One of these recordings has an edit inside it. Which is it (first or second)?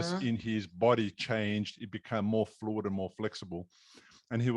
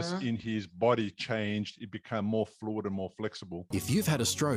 first